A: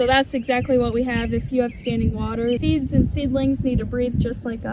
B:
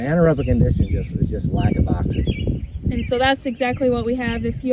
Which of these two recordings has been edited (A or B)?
A